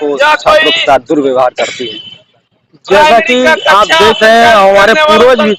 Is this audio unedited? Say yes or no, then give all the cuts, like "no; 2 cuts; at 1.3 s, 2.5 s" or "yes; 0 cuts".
yes; 0 cuts